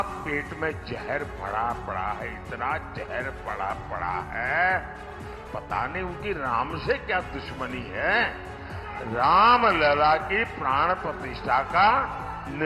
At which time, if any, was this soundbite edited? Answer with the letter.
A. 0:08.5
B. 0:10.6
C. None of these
C